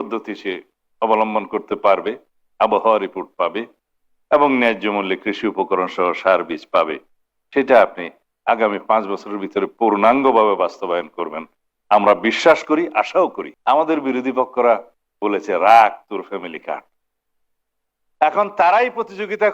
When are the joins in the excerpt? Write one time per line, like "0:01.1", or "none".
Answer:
0:13.5